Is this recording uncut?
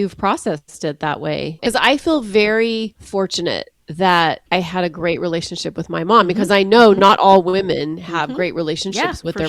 no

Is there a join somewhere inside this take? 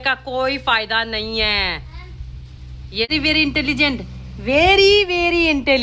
yes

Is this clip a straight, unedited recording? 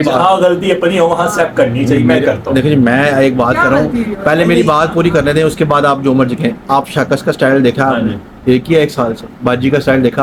yes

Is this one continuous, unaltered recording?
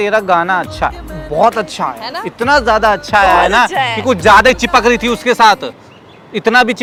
yes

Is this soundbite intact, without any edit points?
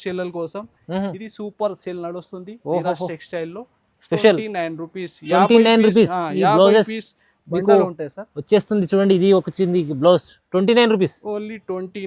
yes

